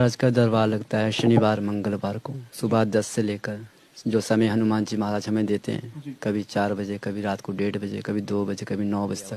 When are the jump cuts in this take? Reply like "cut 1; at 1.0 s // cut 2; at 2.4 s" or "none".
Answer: none